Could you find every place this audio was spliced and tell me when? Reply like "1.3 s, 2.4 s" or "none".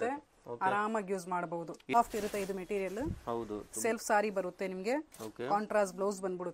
1.9 s